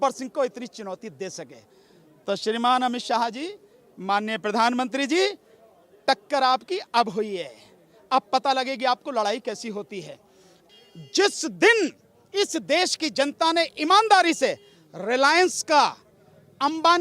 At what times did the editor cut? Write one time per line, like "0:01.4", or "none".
0:10.6

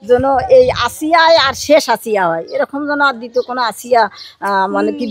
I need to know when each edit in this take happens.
none

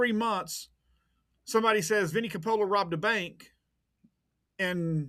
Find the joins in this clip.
none

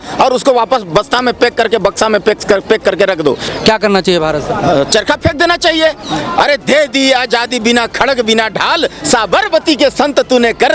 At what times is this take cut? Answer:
0:03.5

